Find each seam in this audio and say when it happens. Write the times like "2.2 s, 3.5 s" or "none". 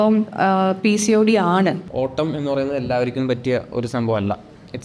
1.8 s